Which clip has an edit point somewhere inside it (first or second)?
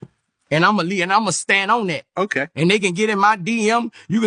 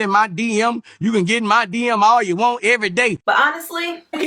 second